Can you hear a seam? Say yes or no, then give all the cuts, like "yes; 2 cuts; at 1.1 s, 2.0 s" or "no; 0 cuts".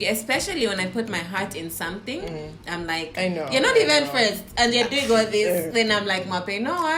no; 0 cuts